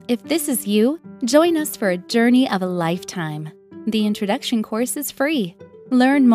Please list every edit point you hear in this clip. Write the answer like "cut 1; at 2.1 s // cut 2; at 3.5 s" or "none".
none